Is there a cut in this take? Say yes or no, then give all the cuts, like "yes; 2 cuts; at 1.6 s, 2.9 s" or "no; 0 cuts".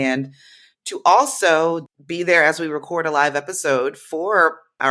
yes; 1 cut; at 1.9 s